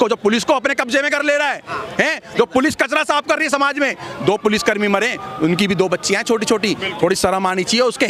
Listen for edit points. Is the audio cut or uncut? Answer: uncut